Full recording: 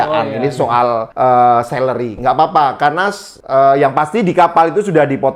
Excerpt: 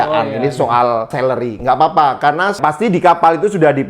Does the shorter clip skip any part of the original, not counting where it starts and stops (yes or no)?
yes